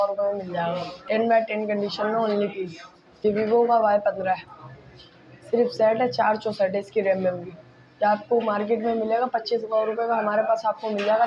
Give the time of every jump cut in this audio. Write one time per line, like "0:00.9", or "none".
0:00.9
0:03.2